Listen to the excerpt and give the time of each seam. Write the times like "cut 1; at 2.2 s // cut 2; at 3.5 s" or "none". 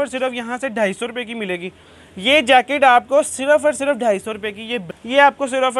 cut 1; at 4.9 s